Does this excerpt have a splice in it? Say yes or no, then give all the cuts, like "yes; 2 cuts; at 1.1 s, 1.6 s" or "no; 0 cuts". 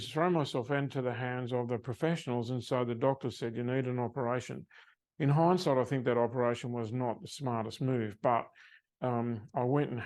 no; 0 cuts